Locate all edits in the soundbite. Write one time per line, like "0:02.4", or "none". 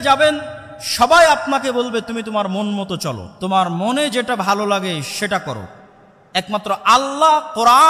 0:03.3